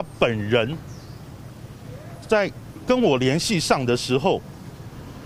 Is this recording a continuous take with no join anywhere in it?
yes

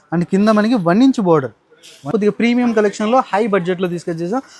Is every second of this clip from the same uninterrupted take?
no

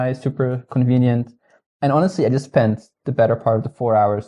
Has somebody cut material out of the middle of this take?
no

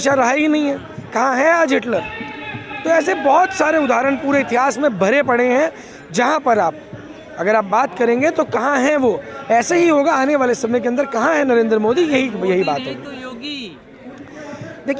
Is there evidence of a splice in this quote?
no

